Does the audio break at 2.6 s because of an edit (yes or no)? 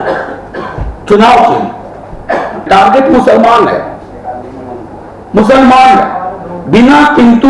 yes